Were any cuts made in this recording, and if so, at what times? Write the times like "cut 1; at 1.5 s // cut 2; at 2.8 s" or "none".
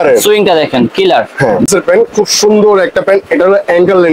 cut 1; at 1.7 s